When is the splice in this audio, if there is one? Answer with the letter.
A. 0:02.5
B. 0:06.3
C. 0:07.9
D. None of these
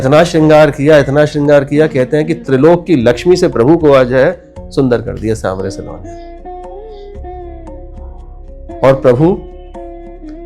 D